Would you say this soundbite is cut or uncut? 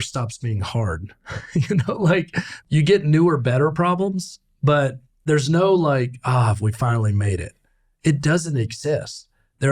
cut